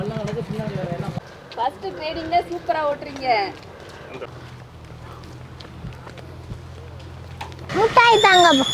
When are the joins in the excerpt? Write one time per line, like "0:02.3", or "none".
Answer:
0:01.2
0:04.3
0:07.7